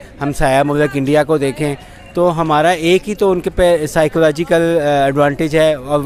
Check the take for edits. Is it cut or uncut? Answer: uncut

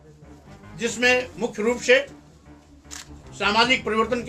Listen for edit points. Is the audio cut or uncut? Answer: uncut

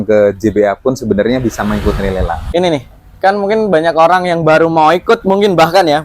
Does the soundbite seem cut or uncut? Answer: cut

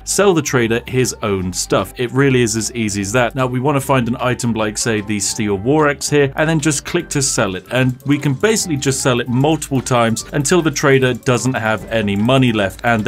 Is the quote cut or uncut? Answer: uncut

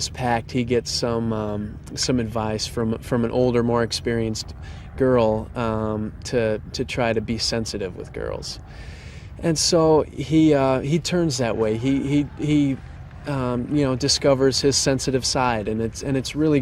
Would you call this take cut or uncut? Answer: uncut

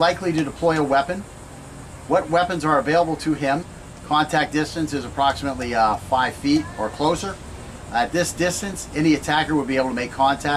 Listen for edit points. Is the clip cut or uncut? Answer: uncut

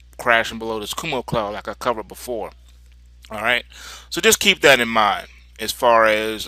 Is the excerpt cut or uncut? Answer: uncut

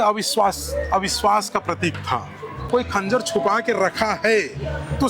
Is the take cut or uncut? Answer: cut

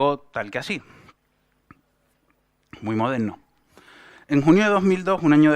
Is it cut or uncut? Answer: cut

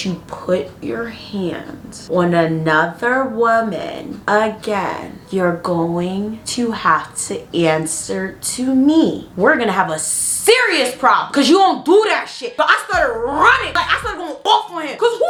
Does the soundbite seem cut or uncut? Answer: uncut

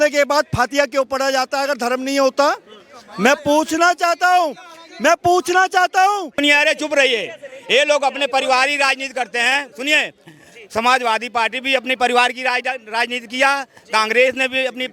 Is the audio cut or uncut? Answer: cut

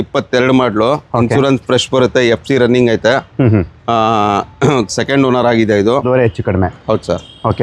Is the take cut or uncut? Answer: cut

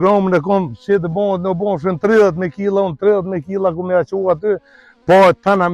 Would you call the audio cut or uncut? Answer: uncut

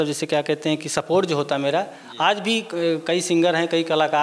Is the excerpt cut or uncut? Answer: uncut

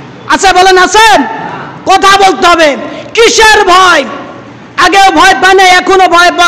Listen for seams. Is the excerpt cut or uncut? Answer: uncut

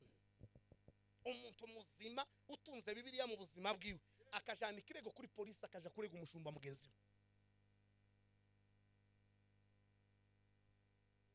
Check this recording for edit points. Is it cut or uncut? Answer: uncut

